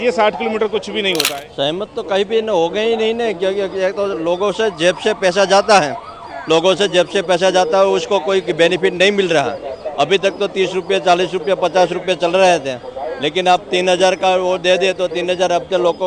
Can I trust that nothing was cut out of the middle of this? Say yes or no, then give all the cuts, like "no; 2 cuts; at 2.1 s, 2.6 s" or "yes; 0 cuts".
no; 1 cut; at 1.3 s